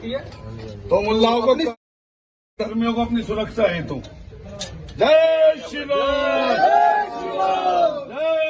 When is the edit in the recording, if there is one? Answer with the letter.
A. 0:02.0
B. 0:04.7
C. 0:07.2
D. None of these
D